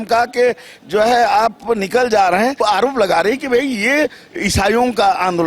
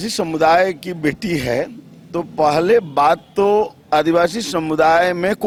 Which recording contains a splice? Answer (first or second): first